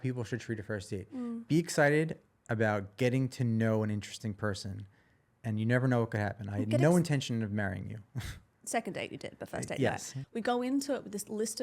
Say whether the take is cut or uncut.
cut